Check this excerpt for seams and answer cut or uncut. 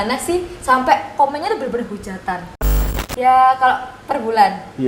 cut